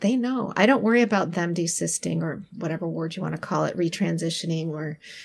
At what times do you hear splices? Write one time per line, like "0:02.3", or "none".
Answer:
none